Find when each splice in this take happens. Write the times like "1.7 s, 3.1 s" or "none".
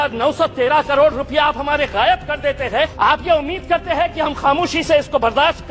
2.9 s